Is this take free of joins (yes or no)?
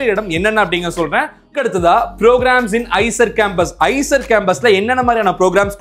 no